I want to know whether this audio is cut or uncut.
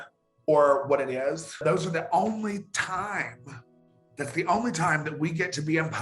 cut